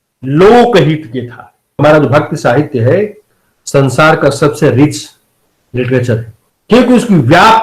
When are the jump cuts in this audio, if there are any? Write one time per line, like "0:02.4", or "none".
0:01.8